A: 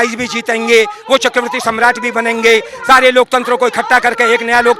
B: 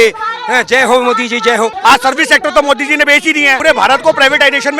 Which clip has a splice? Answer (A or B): B